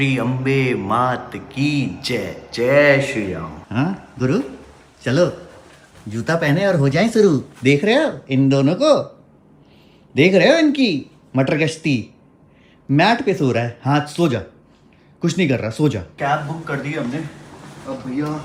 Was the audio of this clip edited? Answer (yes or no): no